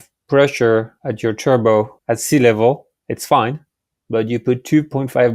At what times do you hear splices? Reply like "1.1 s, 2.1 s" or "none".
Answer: 1.0 s, 2.0 s